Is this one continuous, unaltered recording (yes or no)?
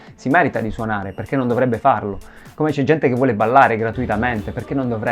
yes